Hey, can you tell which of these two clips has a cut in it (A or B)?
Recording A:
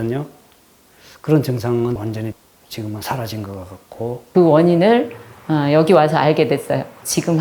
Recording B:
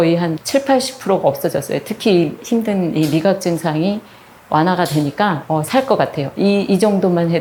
A